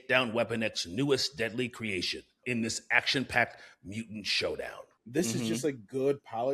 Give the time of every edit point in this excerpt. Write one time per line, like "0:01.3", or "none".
0:02.4
0:04.9